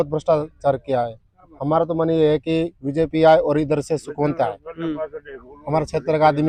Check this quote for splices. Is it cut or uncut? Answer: uncut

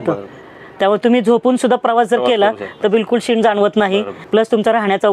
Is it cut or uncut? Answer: cut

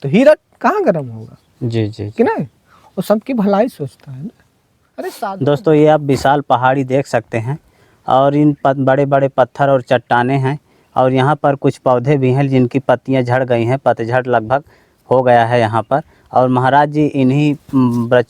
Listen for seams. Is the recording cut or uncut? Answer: cut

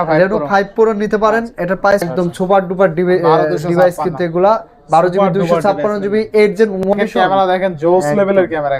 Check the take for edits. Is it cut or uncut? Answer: cut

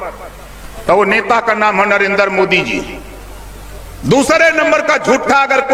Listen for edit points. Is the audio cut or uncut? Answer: uncut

